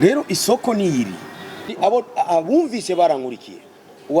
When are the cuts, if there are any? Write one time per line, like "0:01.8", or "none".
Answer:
0:01.7

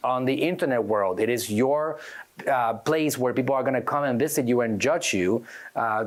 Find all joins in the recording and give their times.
none

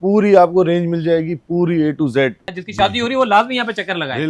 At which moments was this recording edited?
0:02.4

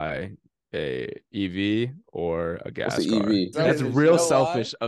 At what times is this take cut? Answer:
0:03.5

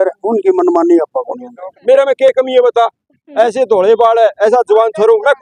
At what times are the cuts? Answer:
0:01.7

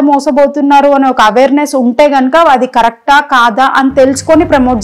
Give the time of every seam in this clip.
none

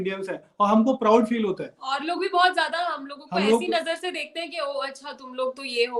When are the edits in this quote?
none

